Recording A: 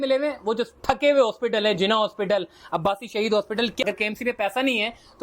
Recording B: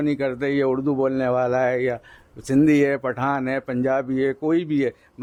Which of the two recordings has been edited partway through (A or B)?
A